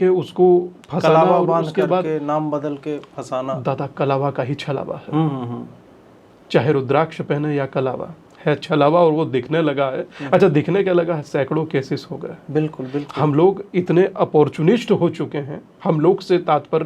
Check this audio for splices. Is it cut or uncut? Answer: uncut